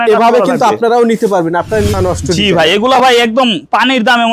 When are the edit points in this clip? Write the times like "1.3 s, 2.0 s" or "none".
1.9 s